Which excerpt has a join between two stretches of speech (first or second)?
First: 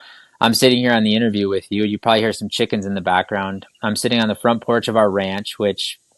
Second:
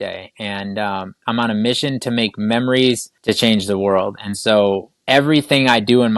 second